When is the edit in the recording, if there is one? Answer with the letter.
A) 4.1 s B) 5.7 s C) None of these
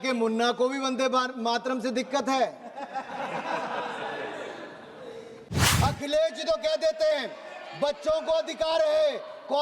B